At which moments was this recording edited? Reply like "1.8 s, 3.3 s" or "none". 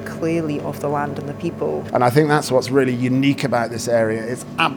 1.8 s